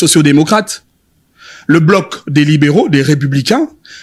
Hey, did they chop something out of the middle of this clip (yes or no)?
no